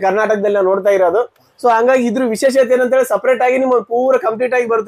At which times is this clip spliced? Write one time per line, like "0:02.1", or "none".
none